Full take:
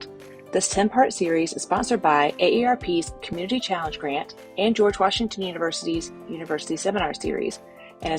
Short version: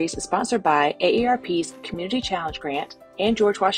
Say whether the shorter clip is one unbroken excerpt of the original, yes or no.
yes